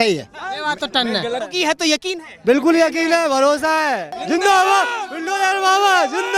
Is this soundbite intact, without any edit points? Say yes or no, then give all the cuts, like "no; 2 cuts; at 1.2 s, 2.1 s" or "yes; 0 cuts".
no; 2 cuts; at 1.5 s, 4.1 s